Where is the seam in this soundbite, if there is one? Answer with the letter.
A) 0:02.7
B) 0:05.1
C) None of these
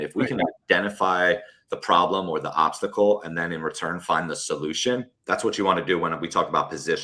B